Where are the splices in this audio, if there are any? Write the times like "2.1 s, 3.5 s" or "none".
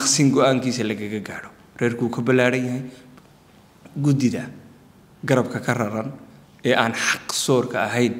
3.0 s